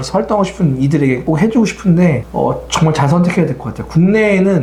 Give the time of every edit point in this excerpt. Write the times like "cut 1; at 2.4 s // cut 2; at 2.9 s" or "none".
none